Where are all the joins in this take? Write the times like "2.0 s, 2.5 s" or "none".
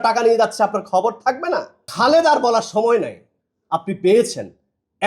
1.8 s